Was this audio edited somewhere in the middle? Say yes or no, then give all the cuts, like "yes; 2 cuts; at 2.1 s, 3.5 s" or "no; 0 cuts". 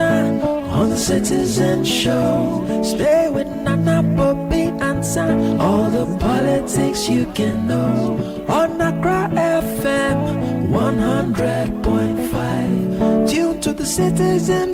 no; 0 cuts